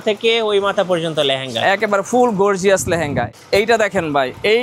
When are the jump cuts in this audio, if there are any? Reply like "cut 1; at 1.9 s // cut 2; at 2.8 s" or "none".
cut 1; at 3.3 s

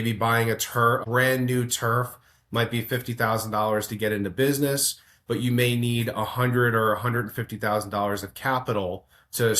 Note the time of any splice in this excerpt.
cut 1; at 1.0 s

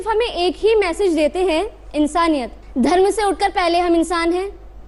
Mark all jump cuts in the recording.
cut 1; at 2.6 s

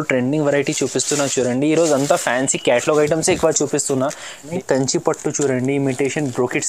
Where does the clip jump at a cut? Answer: cut 1; at 4.5 s

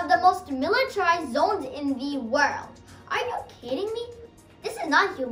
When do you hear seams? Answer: cut 1; at 4.2 s

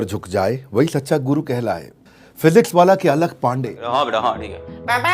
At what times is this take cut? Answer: cut 1; at 2.0 s // cut 2; at 3.7 s

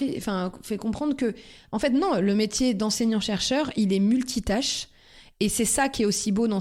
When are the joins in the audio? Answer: none

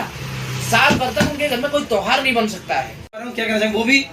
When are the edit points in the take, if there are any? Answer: cut 1; at 3.2 s

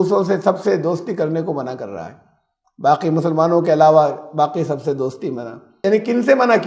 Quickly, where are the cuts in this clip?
cut 1; at 5.8 s

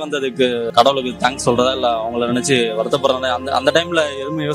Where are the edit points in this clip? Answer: none

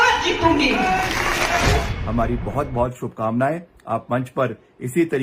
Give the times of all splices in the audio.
cut 1; at 1.6 s

